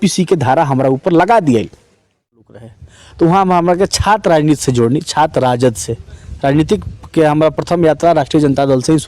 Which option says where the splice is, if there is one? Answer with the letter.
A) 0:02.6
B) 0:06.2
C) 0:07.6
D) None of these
A